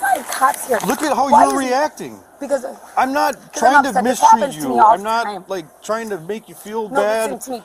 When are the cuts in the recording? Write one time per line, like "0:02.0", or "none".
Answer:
none